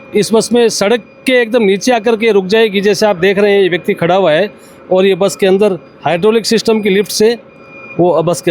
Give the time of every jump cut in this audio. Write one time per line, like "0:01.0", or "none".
none